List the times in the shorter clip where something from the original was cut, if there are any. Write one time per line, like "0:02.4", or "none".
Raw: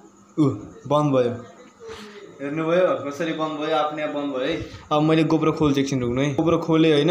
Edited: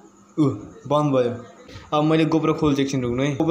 0:01.7